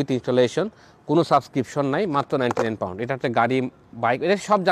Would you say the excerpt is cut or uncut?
uncut